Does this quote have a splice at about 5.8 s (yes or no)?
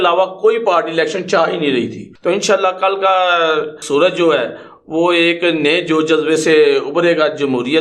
no